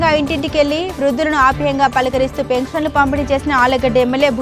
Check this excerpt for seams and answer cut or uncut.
uncut